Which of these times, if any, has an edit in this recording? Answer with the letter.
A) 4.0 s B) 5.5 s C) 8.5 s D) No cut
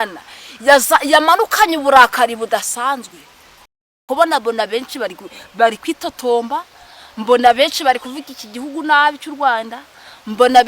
A